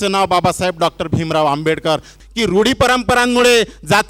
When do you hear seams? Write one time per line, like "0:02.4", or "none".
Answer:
0:02.2